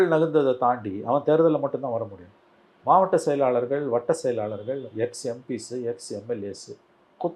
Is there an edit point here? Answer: no; 0 cuts

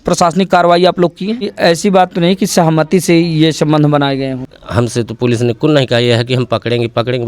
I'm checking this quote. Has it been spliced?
yes; 2 cuts; at 1.5 s, 4.5 s

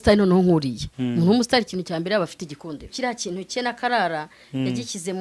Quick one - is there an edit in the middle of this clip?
yes; 1 cut; at 2.9 s

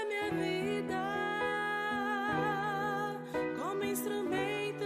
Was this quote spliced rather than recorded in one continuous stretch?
yes; 1 cut; at 1.9 s

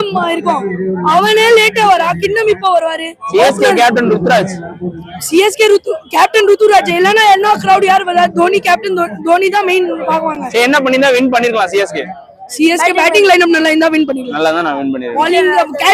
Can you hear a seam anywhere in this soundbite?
no; 0 cuts

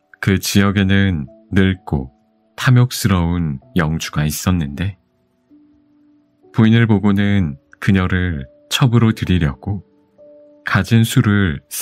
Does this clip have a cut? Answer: yes; 2 cuts; at 5.1 s, 6.5 s

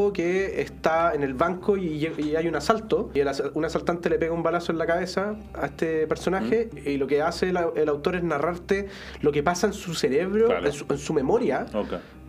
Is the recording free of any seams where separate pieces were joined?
no; 2 cuts; at 3.1 s, 6.7 s

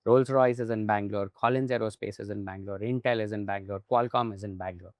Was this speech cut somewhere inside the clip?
no; 0 cuts

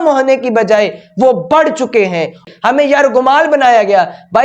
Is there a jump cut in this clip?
yes; 1 cut; at 2.4 s

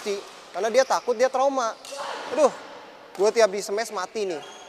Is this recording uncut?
yes; 0 cuts

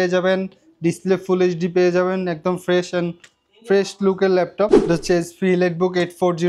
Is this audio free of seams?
no; 1 cut; at 4.8 s

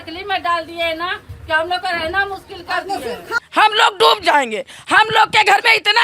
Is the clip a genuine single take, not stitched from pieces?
no; 1 cut; at 3.3 s

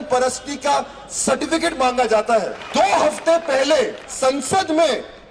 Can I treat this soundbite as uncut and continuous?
no; 2 cuts; at 2.6 s, 4.0 s

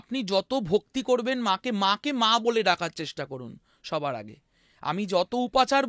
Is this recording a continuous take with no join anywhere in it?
yes; 0 cuts

